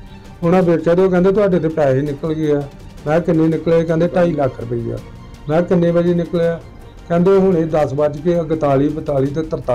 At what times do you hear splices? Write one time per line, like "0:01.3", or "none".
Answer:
none